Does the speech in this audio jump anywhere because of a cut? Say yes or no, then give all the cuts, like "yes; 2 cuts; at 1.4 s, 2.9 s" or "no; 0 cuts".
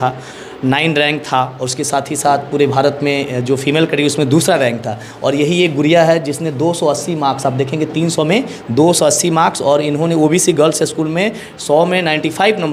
no; 0 cuts